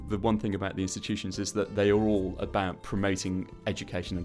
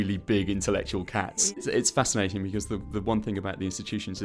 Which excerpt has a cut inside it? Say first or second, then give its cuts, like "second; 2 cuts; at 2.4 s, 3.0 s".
second; 1 cut; at 1.6 s